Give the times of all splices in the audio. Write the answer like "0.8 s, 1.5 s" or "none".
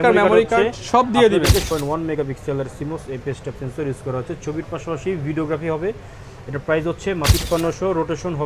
1.7 s, 7.3 s